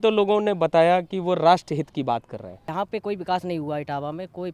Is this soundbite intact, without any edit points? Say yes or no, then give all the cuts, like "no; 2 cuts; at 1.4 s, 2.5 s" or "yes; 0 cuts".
no; 1 cut; at 2.7 s